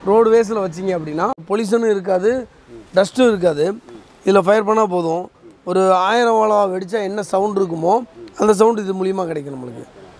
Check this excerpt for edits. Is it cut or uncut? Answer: cut